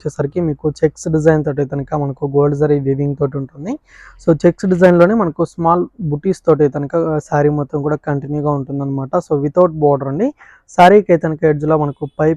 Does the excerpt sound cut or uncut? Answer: uncut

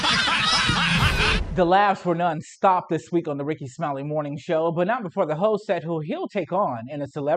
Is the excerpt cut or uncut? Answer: uncut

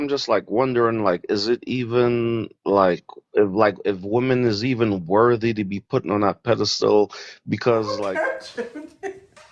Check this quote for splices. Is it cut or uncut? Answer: cut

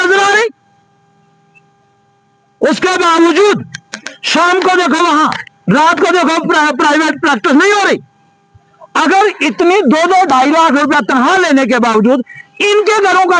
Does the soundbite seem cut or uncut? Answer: uncut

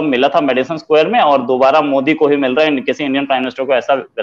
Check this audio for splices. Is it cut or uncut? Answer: uncut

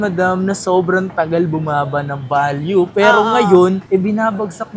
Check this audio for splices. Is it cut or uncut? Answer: uncut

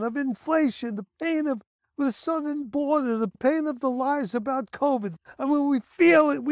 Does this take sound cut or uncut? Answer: cut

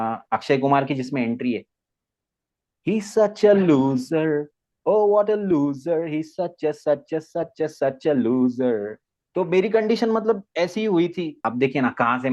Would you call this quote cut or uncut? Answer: cut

